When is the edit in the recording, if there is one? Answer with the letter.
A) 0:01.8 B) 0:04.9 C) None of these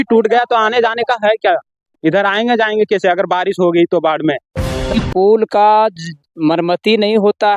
B